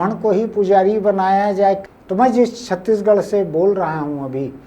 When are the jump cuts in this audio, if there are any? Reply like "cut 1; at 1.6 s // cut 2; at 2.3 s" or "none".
cut 1; at 1.8 s